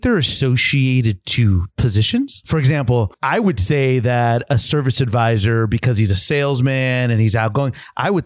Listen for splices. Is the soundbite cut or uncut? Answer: cut